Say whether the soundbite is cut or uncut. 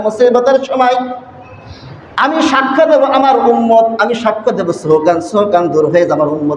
uncut